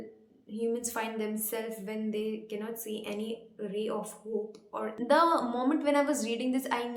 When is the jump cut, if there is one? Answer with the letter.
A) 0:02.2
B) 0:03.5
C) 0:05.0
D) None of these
C